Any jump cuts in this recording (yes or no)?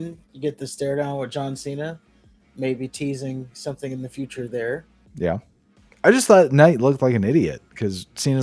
no